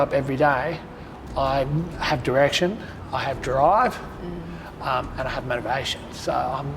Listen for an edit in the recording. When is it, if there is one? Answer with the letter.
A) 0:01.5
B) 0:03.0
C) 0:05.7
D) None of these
B